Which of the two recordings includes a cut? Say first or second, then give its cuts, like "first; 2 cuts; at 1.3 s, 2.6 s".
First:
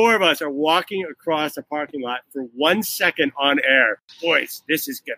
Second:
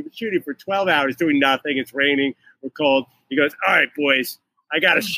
first; 1 cut; at 4.1 s